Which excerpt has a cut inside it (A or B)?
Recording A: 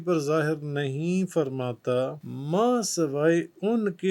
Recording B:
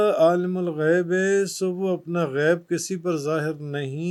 A